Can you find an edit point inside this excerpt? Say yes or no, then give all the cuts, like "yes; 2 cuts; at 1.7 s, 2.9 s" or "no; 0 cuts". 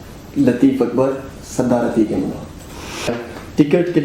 yes; 1 cut; at 3.1 s